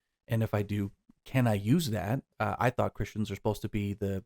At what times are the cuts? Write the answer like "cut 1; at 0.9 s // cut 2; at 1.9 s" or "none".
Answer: cut 1; at 2.3 s